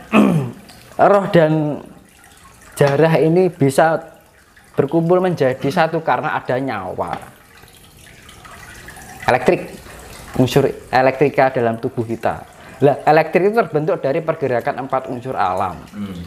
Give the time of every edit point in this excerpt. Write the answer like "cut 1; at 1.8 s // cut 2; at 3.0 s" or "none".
none